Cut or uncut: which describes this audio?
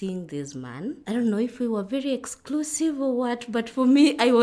uncut